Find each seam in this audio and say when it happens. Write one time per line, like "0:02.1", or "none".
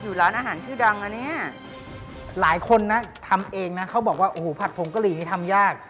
0:01.7